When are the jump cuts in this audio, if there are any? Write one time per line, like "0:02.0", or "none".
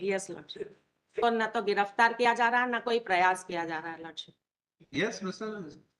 0:01.2